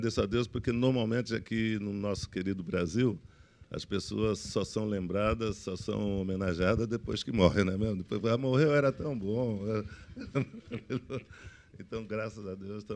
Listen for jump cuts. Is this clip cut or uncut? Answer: cut